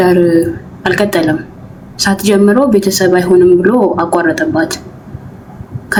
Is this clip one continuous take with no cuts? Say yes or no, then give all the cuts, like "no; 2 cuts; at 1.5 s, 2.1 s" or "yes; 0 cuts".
yes; 0 cuts